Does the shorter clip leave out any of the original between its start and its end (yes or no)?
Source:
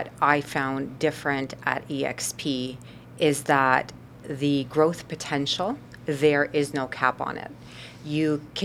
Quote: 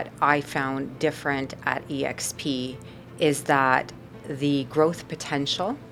no